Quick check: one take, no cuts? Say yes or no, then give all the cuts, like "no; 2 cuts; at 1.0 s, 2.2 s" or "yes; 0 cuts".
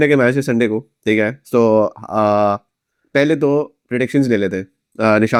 yes; 0 cuts